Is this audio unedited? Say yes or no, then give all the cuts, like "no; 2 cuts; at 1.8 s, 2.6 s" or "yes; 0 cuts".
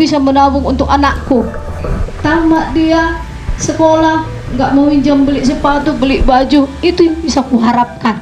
yes; 0 cuts